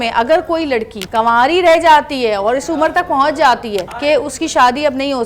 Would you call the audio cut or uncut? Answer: cut